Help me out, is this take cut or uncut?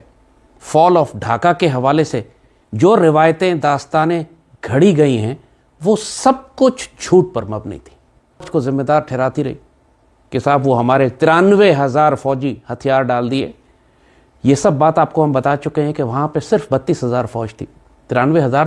cut